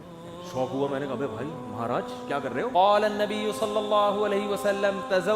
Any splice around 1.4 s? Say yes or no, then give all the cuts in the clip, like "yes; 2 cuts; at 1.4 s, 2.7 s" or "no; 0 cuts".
no; 1 cut; at 2.7 s